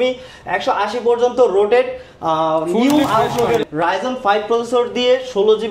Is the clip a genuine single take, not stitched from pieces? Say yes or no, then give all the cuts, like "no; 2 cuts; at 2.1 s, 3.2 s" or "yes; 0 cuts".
no; 1 cut; at 3.6 s